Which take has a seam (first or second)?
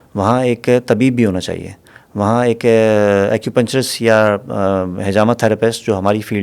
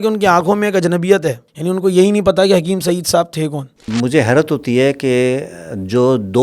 second